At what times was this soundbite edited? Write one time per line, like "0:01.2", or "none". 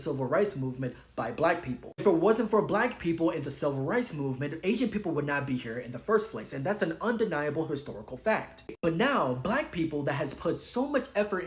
0:08.7